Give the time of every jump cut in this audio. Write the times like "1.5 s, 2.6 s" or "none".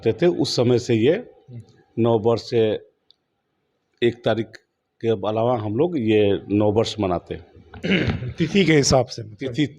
none